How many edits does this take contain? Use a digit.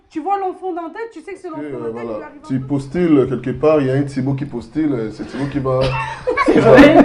1